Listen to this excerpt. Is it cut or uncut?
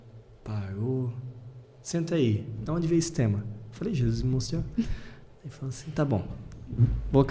uncut